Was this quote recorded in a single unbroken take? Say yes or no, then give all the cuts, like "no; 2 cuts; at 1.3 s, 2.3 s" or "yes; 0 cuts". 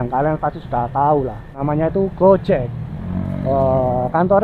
no; 1 cut; at 1.6 s